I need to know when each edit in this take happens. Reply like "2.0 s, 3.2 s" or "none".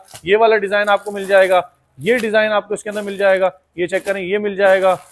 none